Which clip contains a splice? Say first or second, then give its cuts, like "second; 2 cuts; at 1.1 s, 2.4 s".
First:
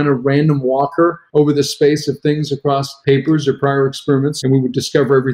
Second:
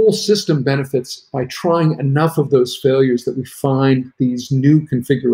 first; 3 cuts; at 1.2 s, 2.9 s, 4.4 s